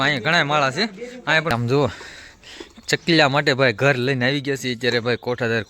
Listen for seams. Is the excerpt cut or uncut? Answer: cut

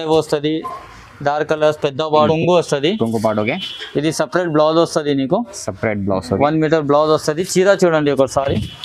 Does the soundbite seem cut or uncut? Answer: cut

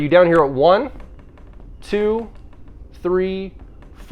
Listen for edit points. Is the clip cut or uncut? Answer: uncut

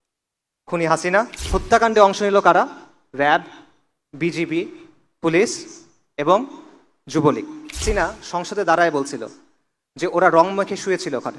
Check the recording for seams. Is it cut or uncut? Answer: cut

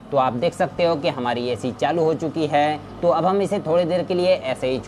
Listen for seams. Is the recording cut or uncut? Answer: cut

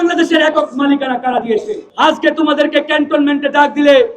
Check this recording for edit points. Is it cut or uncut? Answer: cut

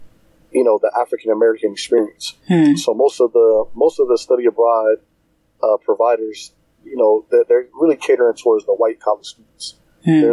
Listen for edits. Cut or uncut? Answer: uncut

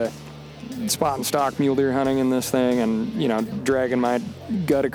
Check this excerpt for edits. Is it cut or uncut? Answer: uncut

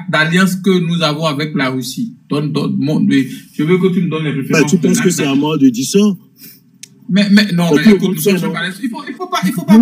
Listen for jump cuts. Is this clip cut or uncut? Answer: uncut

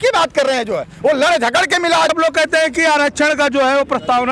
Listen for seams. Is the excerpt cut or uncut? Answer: cut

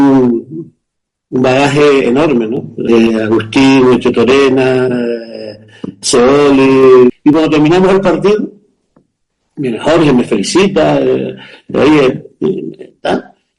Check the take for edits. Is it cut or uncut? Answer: cut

